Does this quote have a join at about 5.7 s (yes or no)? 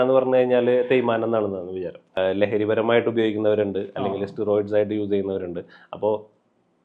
no